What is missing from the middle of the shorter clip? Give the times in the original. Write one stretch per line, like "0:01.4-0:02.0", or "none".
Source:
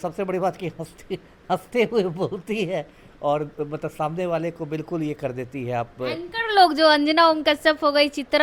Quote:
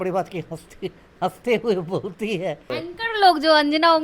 0:02.9-0:06.0